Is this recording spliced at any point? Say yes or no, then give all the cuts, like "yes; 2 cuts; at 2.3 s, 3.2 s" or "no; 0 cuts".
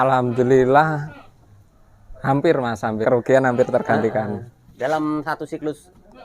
yes; 1 cut; at 3.0 s